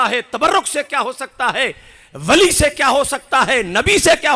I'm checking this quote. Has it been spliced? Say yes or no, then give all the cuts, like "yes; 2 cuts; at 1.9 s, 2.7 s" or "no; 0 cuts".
no; 0 cuts